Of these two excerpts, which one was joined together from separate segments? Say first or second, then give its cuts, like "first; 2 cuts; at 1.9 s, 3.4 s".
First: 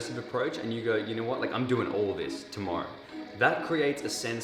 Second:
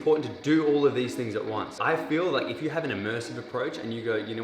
second; 1 cut; at 1.8 s